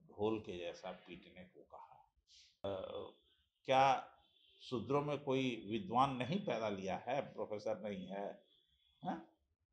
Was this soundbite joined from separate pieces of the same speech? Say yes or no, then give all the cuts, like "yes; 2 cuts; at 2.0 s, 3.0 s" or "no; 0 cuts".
yes; 1 cut; at 2.6 s